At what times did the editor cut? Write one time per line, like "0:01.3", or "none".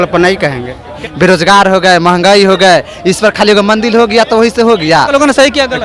0:01.0
0:05.1